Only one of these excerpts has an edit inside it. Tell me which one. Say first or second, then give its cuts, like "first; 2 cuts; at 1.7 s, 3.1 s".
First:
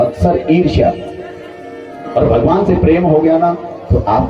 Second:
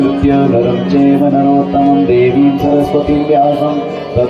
first; 1 cut; at 2.1 s